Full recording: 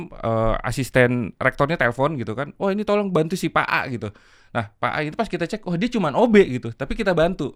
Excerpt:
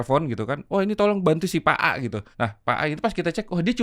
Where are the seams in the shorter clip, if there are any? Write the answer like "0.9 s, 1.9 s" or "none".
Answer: 2.2 s

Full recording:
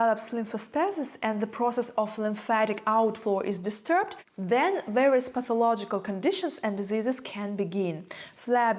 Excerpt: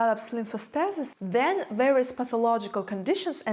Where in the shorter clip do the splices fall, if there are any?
1.1 s

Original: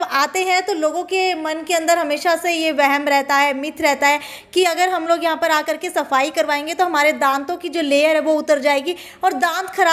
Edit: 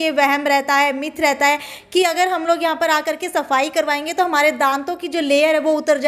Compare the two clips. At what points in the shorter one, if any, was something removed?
none

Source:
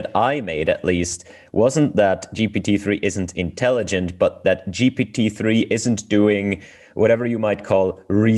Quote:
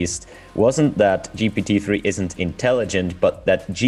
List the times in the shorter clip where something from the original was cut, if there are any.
none

